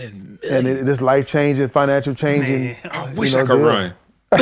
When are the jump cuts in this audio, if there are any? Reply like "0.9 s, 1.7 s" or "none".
none